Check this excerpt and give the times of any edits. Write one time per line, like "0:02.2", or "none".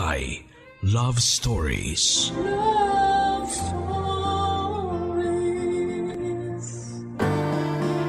0:07.1